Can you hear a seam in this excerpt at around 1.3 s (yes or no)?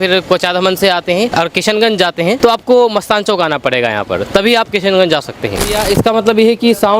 yes